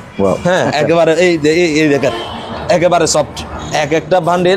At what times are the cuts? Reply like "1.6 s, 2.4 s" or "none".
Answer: 3.5 s